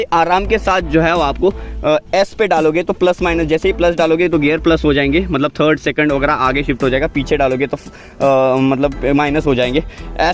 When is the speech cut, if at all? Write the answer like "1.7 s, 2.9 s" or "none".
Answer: none